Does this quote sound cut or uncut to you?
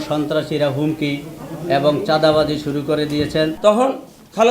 cut